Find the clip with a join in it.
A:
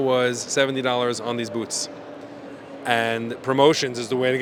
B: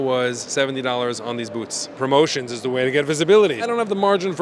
B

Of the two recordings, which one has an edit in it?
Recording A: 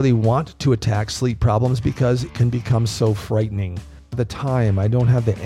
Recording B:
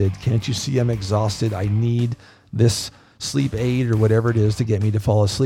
A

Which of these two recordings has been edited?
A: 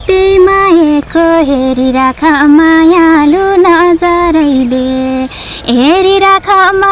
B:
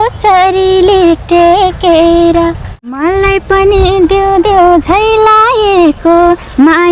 B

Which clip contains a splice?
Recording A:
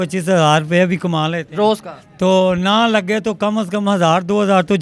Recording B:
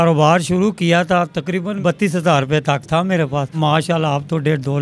B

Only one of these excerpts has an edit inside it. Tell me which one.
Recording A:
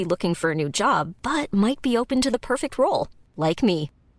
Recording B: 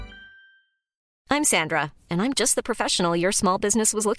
B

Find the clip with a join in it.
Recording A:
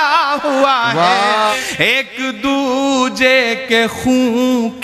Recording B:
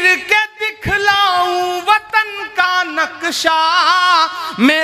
A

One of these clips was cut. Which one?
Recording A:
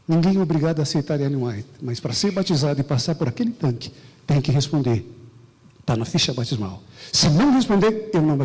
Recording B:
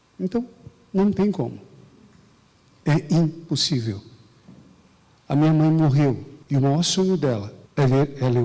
B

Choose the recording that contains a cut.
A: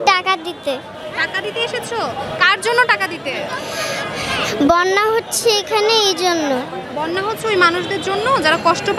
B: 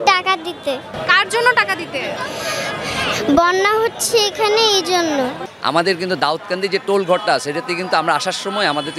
B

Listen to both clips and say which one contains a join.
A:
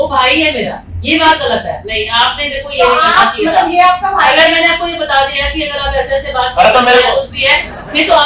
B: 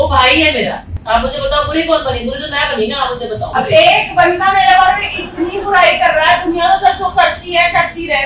B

